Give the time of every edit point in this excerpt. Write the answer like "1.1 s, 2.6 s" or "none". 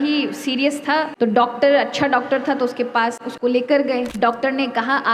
1.1 s, 3.2 s, 4.1 s